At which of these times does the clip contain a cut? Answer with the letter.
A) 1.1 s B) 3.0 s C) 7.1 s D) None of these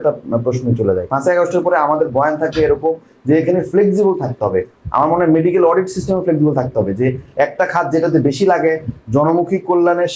A